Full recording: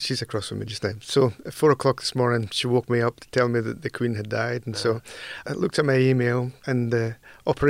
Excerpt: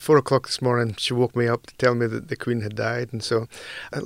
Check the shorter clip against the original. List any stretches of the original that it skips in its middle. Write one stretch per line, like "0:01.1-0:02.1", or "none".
none